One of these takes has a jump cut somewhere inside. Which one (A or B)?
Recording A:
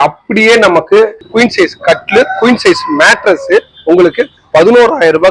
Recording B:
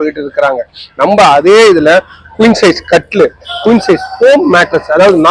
A